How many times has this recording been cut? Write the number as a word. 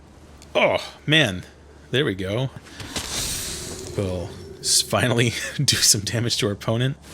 one